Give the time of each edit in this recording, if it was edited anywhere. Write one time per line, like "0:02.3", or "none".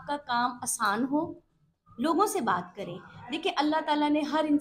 none